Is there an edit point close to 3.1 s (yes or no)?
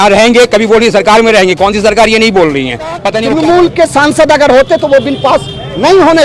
yes